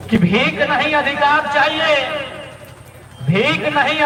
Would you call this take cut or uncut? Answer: uncut